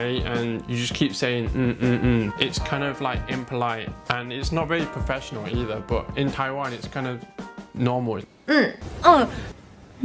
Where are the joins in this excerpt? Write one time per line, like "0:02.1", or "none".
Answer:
none